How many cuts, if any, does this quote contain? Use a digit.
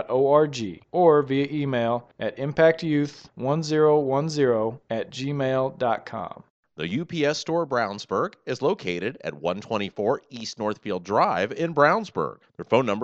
1